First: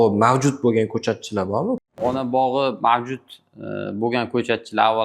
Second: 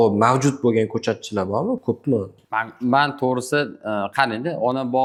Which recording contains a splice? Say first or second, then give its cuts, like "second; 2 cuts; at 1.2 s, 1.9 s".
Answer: first; 1 cut; at 1.8 s